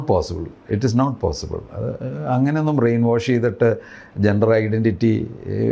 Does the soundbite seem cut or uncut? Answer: uncut